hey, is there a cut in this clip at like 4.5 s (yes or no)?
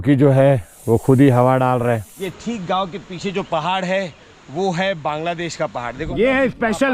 no